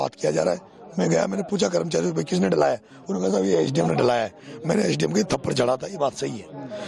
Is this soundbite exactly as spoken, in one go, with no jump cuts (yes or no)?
yes